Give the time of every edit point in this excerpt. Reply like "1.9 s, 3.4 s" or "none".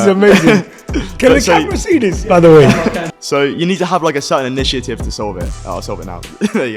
3.0 s